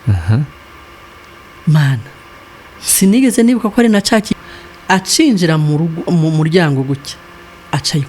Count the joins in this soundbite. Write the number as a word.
one